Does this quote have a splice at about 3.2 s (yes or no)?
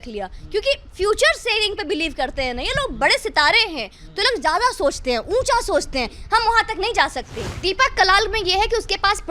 no